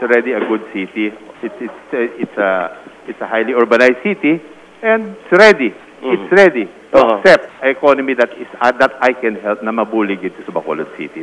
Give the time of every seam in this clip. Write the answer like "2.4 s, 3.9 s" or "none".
5.2 s, 7.5 s